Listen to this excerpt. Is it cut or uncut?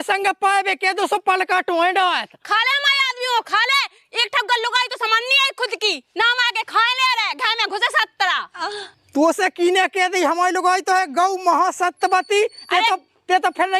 uncut